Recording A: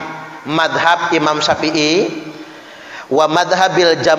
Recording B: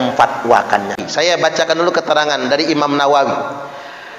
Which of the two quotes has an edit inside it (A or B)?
B